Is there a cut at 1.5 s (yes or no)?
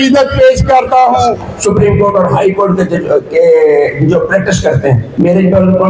yes